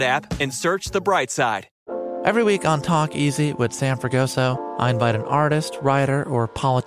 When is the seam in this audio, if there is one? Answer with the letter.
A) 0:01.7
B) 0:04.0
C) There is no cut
A